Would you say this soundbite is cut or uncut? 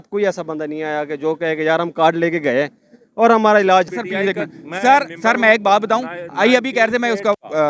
cut